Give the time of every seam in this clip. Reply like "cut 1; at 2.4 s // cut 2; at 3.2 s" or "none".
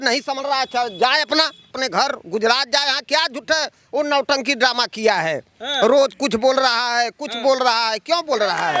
cut 1; at 1.7 s